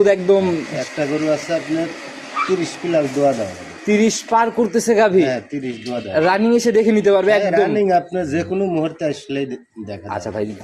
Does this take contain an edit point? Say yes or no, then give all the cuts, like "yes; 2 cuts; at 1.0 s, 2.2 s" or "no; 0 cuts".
no; 0 cuts